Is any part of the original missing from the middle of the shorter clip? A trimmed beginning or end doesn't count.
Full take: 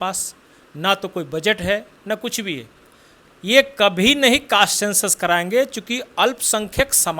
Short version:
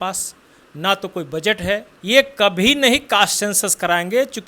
yes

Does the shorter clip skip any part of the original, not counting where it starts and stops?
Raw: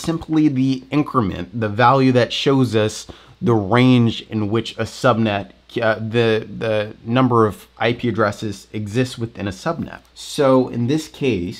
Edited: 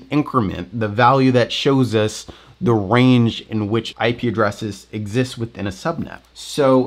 yes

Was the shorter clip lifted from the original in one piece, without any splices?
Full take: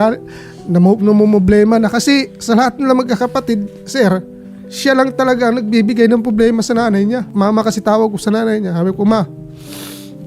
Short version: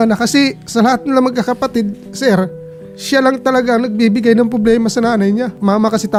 yes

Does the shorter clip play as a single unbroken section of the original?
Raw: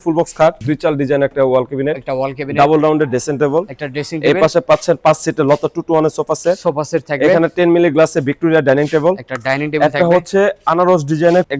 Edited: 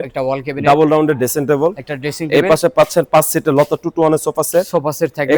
yes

